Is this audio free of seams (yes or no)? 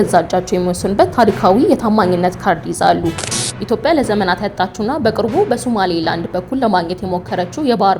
no